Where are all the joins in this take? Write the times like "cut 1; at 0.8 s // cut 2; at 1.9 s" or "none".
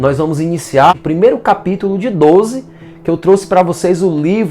cut 1; at 0.9 s